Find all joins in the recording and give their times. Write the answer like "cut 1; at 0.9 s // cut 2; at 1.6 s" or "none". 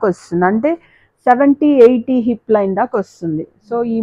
none